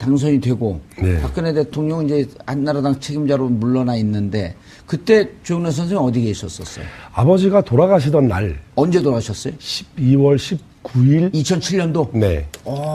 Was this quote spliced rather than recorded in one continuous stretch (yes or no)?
no